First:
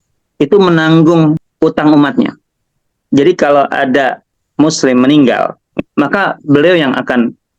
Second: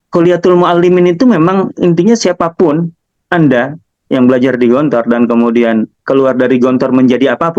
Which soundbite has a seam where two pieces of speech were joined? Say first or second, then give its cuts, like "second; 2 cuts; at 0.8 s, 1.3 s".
first; 3 cuts; at 1.5 s, 4.3 s, 5.8 s